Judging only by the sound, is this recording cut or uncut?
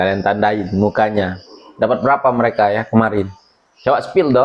uncut